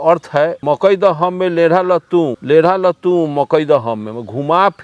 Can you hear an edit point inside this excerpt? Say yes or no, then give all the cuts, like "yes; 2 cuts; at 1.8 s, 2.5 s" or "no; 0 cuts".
yes; 1 cut; at 2.4 s